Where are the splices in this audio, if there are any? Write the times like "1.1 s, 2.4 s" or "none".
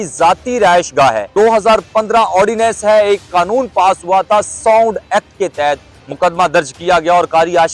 1.2 s